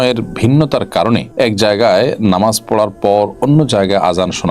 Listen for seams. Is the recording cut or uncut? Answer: cut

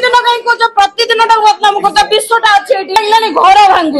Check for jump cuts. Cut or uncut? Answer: cut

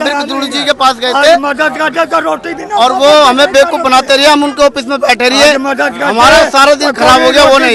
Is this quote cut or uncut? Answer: uncut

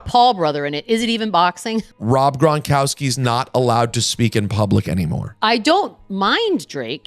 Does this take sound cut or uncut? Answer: cut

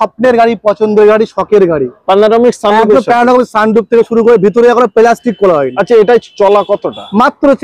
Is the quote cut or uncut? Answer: uncut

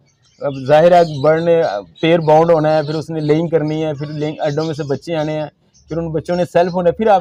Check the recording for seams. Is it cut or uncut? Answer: uncut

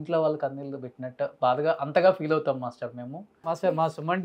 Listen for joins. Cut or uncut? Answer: cut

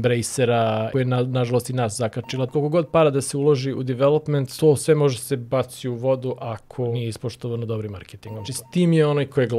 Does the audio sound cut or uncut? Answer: cut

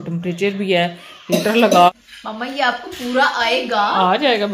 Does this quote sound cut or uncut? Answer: cut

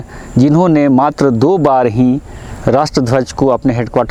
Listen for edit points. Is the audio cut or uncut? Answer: uncut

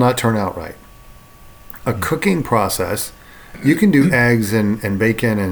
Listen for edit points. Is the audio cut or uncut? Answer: cut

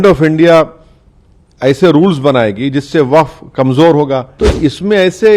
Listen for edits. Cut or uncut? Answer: cut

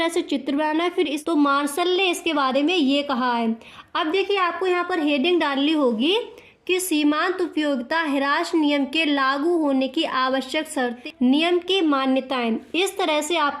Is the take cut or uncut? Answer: cut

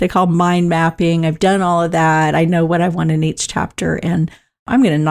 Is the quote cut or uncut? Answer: uncut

